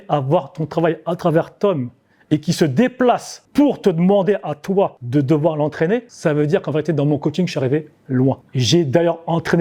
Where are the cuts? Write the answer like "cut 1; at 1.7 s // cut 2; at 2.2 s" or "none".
cut 1; at 3.3 s // cut 2; at 5.0 s // cut 3; at 6.1 s // cut 4; at 8.4 s